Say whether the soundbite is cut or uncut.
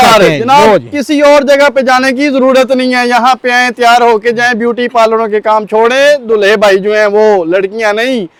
uncut